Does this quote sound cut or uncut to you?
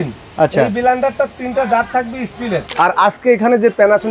cut